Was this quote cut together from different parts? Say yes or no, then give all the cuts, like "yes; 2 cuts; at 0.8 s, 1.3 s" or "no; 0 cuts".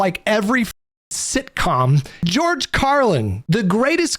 yes; 2 cuts; at 2.2 s, 3.4 s